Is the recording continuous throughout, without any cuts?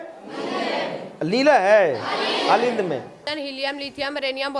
no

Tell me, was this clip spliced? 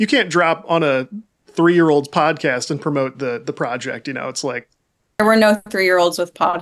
yes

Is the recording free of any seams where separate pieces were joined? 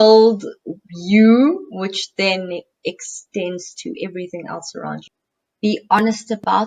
no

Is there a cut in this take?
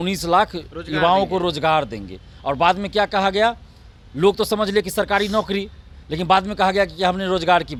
no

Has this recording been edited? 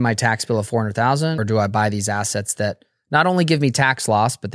yes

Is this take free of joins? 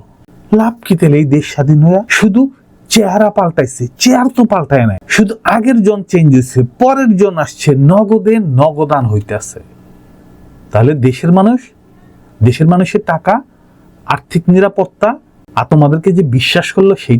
no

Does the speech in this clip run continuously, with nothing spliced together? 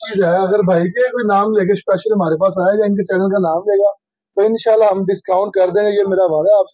yes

